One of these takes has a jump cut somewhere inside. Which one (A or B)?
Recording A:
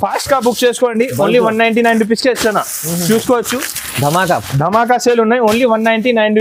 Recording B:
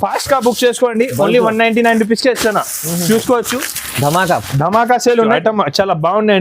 B